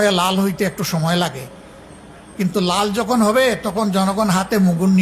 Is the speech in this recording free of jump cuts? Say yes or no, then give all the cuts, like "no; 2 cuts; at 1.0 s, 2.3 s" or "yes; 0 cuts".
yes; 0 cuts